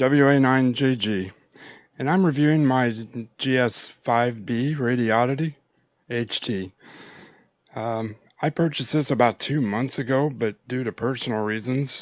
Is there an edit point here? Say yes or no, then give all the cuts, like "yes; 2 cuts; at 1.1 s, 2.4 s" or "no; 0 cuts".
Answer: no; 0 cuts